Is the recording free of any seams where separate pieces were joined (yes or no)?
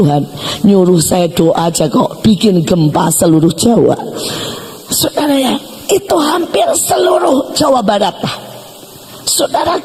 yes